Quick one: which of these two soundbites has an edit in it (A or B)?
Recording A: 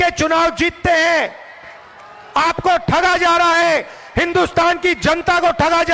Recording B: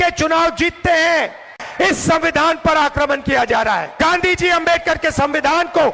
B